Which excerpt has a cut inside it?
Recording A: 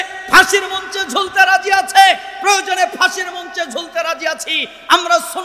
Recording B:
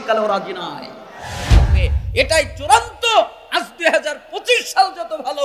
B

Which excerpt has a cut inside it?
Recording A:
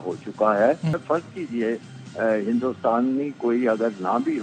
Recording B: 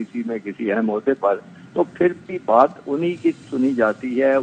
A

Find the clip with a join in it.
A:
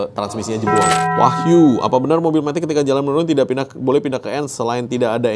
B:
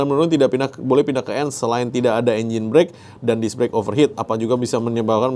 A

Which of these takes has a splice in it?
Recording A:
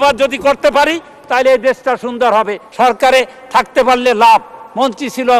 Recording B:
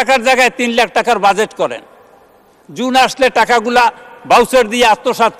A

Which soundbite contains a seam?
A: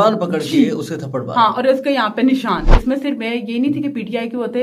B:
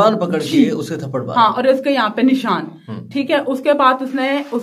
A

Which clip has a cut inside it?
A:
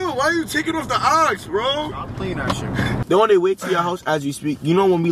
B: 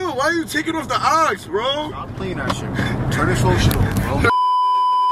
A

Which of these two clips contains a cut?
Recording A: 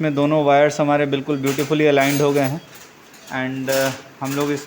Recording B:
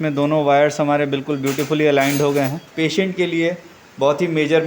B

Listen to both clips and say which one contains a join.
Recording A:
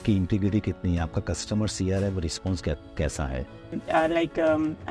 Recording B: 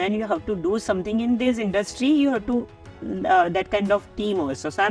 A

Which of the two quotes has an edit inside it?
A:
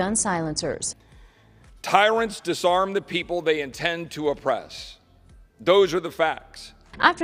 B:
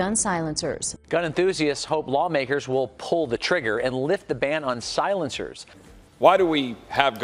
B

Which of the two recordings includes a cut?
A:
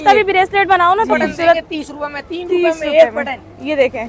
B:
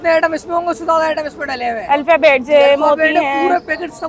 A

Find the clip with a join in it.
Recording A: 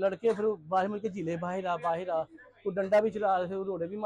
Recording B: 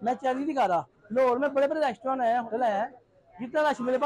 B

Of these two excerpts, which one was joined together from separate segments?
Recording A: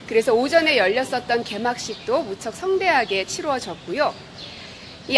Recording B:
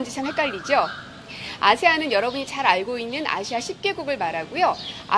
A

